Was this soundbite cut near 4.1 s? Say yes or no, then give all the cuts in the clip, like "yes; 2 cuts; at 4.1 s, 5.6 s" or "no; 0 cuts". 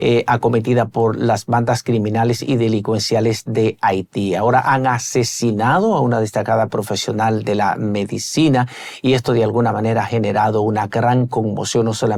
no; 0 cuts